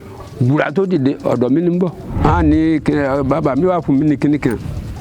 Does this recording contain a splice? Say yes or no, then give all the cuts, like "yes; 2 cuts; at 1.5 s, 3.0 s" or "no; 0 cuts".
yes; 1 cut; at 2.0 s